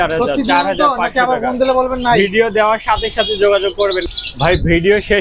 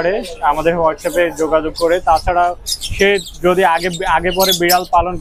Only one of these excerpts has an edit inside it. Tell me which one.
first; 1 cut; at 4.1 s

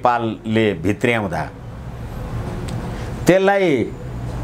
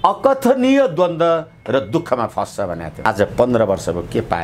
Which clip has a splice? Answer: second; 1 cut; at 3.0 s

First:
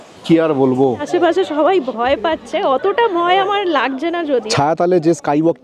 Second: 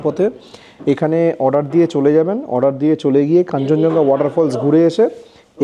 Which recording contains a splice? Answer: first; 2 cuts; at 1.0 s, 4.4 s

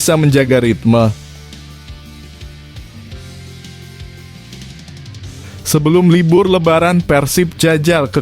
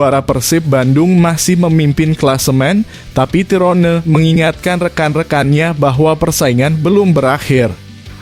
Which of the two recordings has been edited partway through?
first; 2 cuts; at 1.7 s, 5.7 s

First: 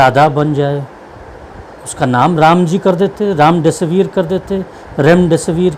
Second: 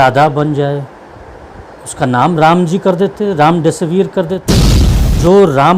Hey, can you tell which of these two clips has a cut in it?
second; 1 cut; at 4.8 s

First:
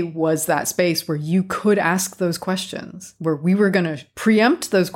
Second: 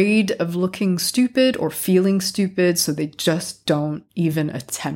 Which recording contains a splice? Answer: second; 1 cut; at 4.0 s

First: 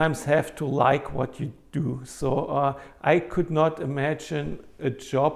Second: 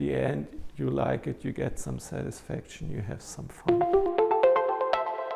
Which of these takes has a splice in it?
second; 1 cut; at 3.5 s

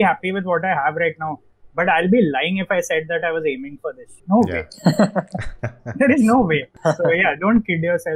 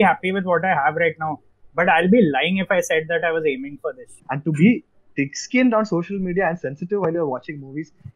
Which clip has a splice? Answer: second; 1 cut; at 4.1 s

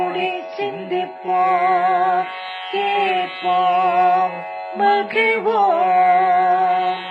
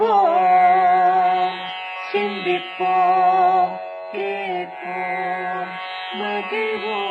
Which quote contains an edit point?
second; 1 cut; at 5.5 s

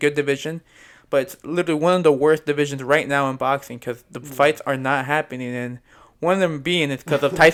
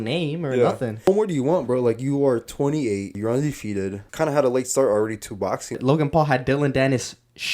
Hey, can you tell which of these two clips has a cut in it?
second; 4 cuts; at 1.1 s, 3.2 s, 4.0 s, 5.8 s

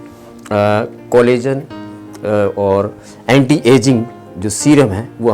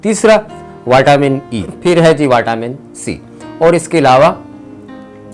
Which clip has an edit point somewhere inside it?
second; 1 cut; at 1.8 s

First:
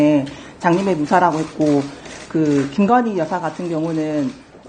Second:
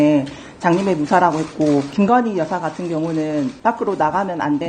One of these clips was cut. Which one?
second; 2 cuts; at 1.9 s, 3.6 s

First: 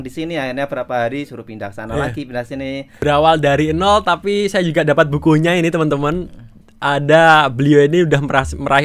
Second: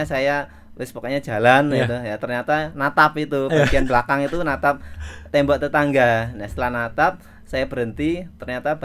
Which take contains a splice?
first; 1 cut; at 2.9 s

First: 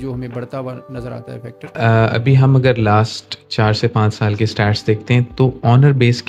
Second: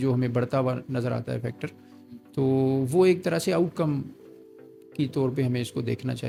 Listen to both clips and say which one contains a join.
first; 1 cut; at 1.6 s

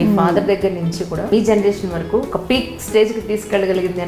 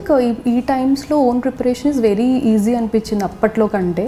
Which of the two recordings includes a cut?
first; 2 cuts; at 1.3 s, 2.3 s

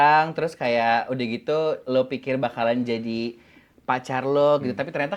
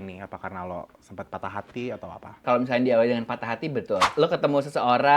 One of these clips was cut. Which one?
second; 2 cuts; at 2.4 s, 4.1 s

